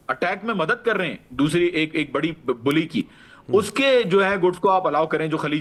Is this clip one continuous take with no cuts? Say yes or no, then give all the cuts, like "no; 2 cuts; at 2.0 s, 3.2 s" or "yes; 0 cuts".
yes; 0 cuts